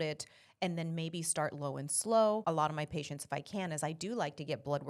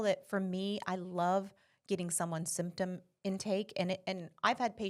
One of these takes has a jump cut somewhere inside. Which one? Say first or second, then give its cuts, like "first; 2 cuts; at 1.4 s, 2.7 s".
first; 1 cut; at 2.4 s